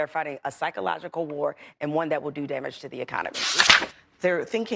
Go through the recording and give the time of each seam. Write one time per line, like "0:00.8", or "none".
0:03.6